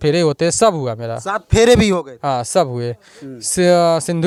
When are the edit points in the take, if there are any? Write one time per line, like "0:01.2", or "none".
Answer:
none